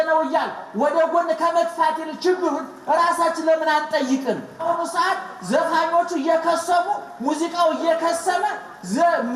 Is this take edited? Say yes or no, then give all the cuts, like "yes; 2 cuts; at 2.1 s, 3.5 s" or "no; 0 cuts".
yes; 1 cut; at 4.6 s